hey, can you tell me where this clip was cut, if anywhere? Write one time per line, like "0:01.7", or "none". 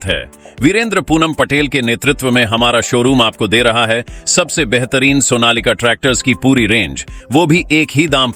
none